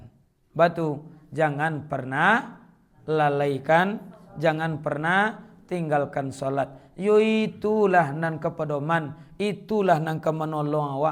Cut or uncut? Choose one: uncut